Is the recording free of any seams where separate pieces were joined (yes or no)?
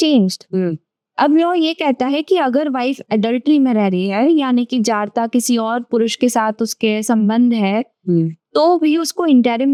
yes